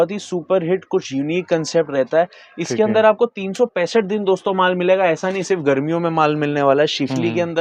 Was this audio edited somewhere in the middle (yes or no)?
no